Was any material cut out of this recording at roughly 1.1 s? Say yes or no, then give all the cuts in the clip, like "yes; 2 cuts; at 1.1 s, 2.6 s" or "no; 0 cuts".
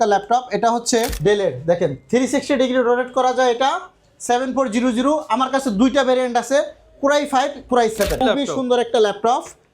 yes; 2 cuts; at 1.1 s, 8.2 s